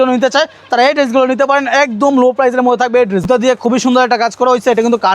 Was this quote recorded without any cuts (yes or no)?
no